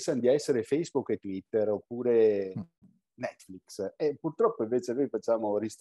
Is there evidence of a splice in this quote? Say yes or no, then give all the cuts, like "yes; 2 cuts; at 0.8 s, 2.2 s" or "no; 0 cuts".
no; 0 cuts